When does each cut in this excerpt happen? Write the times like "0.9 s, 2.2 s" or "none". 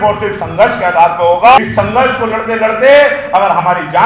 1.6 s